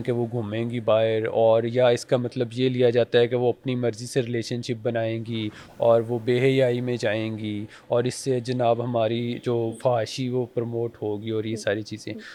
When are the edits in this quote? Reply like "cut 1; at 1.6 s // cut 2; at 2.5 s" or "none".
none